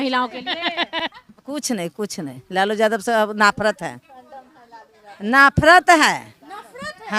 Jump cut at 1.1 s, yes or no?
yes